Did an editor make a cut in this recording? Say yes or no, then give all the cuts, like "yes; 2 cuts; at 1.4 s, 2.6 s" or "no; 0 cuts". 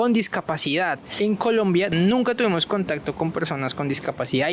yes; 2 cuts; at 1.1 s, 1.9 s